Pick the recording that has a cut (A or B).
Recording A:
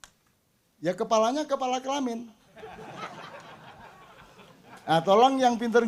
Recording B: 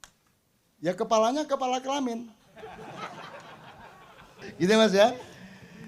B